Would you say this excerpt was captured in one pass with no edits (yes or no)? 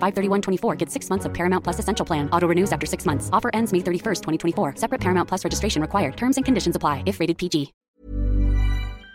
no